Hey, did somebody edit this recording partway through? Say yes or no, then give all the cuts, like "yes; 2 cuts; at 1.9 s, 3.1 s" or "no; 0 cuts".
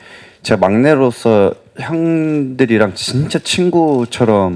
no; 0 cuts